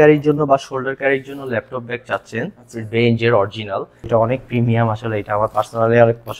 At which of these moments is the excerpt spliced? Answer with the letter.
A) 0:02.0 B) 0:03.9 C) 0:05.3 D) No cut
B